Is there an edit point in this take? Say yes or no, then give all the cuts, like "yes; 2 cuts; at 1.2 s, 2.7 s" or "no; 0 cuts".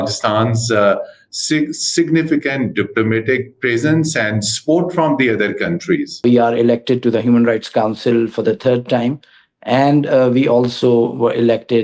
yes; 1 cut; at 6.2 s